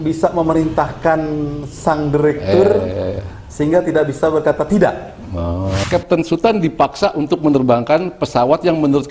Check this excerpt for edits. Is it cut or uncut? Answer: cut